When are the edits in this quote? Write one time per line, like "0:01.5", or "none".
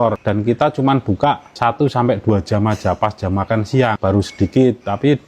0:04.0